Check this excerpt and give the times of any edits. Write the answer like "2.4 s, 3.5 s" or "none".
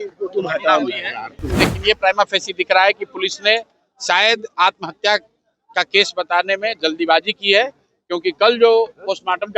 1.7 s